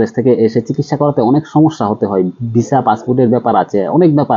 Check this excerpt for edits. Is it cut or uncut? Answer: uncut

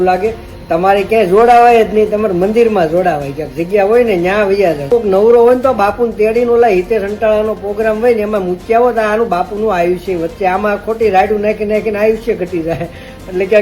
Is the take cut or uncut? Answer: cut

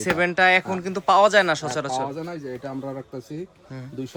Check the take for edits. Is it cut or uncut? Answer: uncut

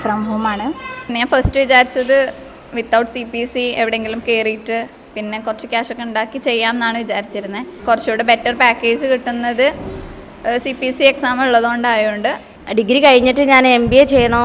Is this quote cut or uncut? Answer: cut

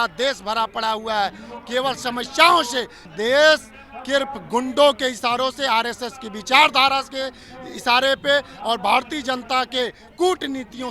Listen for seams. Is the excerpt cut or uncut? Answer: cut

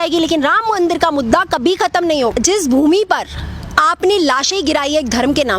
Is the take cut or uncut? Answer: cut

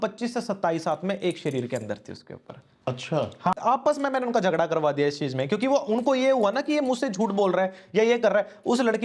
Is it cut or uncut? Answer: cut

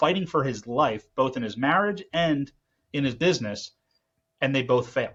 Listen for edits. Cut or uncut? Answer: uncut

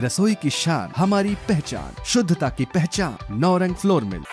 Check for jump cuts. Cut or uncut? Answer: uncut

